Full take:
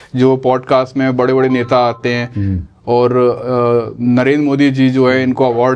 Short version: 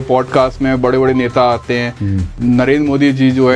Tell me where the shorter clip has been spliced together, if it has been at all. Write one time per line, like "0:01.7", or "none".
0:02.3